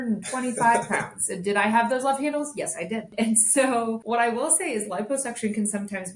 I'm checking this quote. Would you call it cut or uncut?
cut